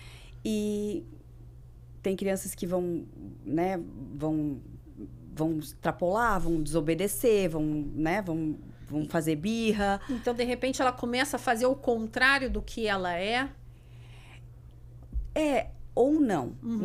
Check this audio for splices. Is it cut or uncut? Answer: uncut